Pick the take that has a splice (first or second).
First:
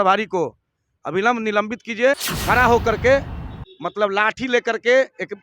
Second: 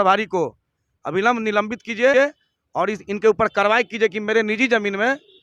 first